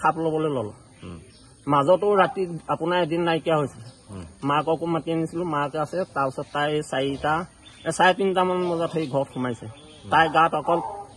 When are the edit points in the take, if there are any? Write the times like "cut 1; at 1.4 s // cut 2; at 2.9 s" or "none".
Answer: none